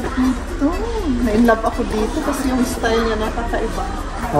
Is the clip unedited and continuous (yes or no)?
yes